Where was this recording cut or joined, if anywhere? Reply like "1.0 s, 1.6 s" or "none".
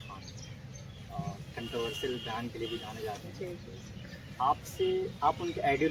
none